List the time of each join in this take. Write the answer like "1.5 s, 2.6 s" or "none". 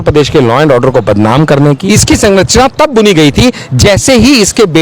1.8 s